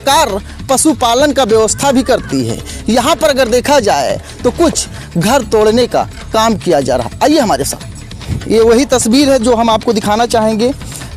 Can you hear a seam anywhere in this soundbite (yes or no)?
yes